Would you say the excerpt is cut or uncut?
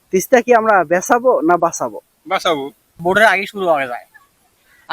cut